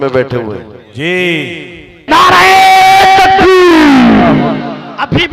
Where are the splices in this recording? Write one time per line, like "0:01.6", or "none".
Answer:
0:02.0